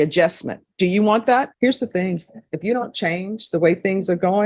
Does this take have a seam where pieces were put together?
yes; 1 cut; at 1.5 s

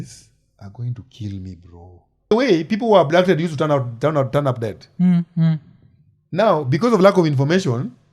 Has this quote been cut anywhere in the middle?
yes; 1 cut; at 2.3 s

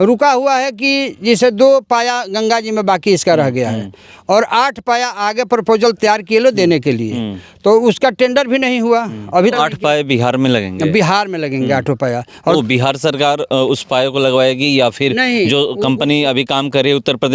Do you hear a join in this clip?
yes; 1 cut; at 9.5 s

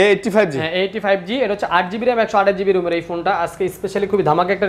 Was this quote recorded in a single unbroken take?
yes; 0 cuts

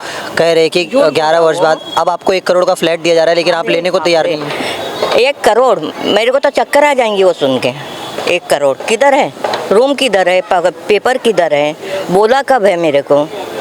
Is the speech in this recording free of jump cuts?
yes; 0 cuts

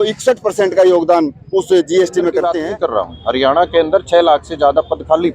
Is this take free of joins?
no; 1 cut; at 2.5 s

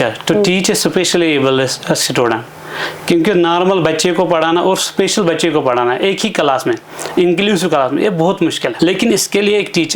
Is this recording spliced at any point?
yes; 1 cut; at 8.7 s

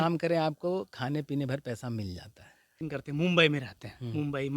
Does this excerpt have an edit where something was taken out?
yes; 1 cut; at 2.7 s

